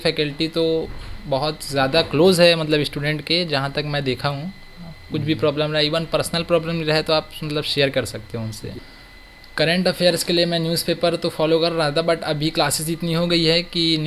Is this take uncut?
no; 1 cut; at 8.8 s

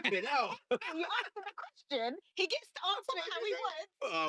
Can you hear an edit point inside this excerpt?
no; 0 cuts

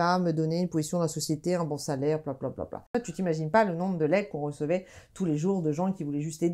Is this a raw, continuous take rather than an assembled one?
no; 1 cut; at 2.9 s

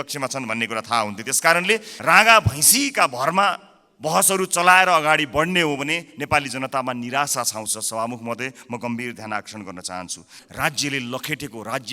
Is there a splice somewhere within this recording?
yes; 2 cuts; at 1.9 s, 10.4 s

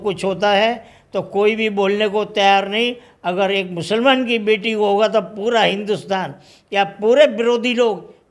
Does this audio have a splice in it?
no; 0 cuts

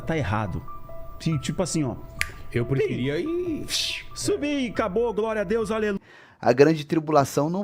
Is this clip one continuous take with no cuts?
no; 1 cut; at 6.0 s

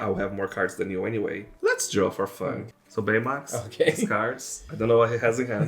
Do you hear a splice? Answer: yes; 2 cuts; at 1.5 s, 2.6 s

